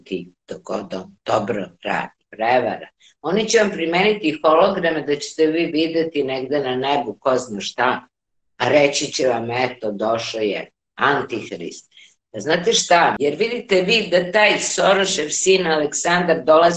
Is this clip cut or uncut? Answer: cut